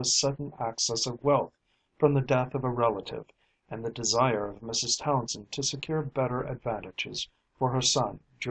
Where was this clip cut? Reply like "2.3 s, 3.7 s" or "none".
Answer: none